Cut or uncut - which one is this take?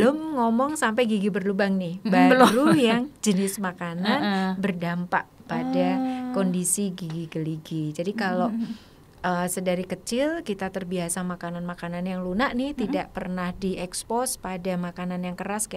uncut